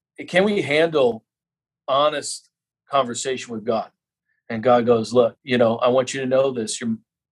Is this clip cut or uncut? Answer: cut